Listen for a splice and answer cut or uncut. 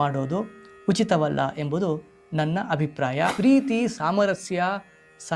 cut